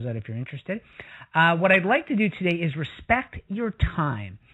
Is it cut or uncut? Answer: cut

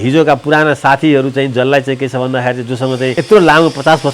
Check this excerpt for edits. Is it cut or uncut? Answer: cut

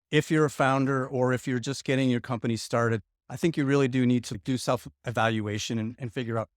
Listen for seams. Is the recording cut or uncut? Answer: cut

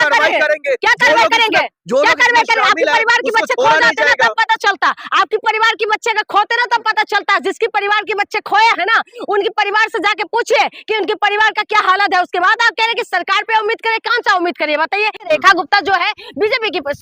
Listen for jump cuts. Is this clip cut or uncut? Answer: cut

